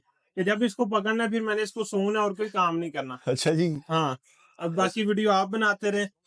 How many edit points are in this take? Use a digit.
0